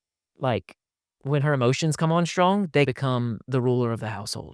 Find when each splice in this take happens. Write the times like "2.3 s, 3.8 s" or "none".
2.9 s

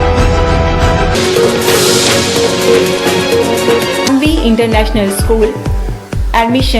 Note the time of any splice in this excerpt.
4.0 s

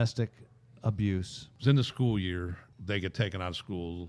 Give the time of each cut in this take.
1.4 s, 2.6 s

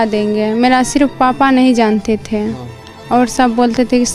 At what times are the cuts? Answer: none

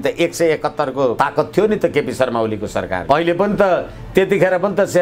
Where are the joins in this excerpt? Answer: 1.1 s, 3.0 s

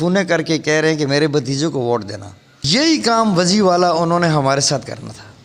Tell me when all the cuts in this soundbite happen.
2.6 s

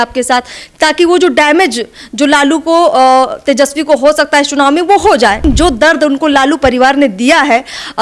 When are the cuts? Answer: 5.4 s

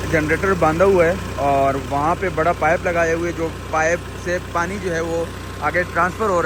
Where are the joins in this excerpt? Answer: none

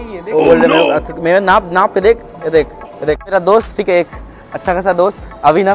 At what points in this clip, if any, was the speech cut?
3.3 s

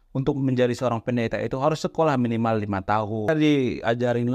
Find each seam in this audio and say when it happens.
3.3 s

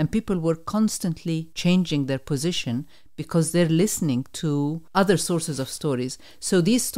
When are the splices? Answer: 1.5 s, 4.8 s

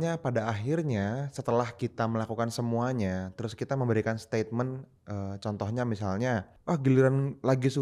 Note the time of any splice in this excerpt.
6.5 s

